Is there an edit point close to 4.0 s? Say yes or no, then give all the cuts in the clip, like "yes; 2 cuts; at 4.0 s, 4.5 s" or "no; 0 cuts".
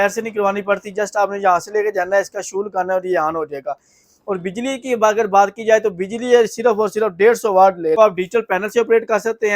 no; 1 cut; at 8.0 s